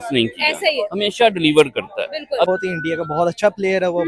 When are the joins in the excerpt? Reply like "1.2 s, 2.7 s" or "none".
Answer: 2.5 s